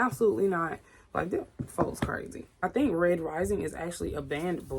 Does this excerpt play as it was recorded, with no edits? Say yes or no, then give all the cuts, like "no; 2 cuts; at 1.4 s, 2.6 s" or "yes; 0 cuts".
no; 1 cut; at 2.6 s